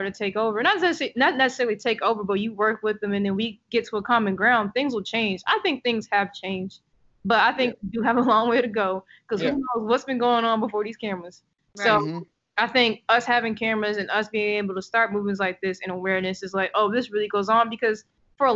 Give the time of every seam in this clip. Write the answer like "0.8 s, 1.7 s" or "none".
none